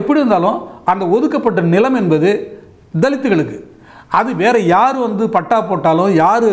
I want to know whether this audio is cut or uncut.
uncut